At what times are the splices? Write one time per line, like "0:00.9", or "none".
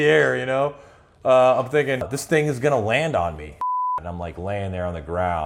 0:02.1
0:03.6